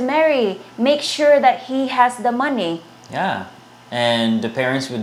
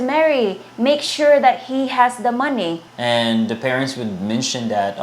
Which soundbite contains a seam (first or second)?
second